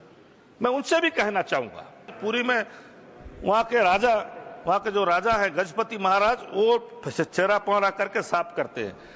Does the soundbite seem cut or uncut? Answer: cut